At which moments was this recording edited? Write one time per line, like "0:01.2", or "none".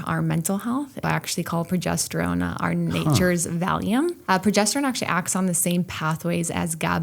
0:01.0
0:04.2